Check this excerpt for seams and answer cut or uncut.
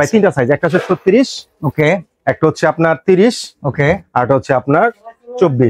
uncut